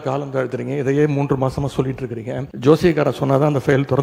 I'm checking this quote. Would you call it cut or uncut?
cut